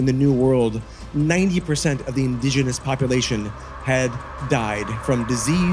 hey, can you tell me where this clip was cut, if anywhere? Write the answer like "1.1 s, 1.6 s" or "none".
none